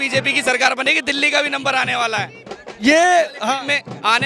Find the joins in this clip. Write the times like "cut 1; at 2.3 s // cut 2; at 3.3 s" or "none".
none

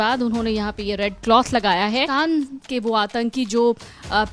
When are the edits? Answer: cut 1; at 2.1 s

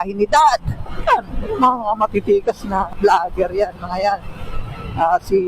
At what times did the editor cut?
cut 1; at 2.9 s

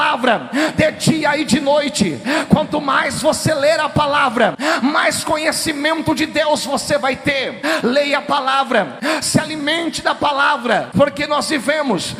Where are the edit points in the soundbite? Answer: cut 1; at 4.6 s // cut 2; at 7.6 s // cut 3; at 8.9 s // cut 4; at 10.9 s

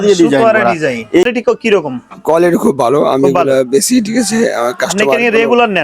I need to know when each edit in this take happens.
cut 1; at 1.2 s

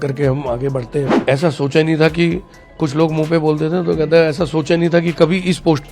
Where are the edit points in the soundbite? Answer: cut 1; at 1.1 s

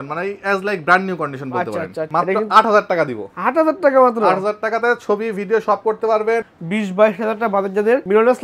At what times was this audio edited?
cut 1; at 2.0 s // cut 2; at 6.5 s

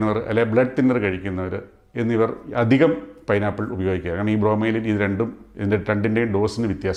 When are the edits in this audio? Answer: none

